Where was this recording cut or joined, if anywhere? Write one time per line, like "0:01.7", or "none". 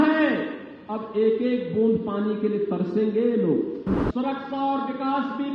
0:03.9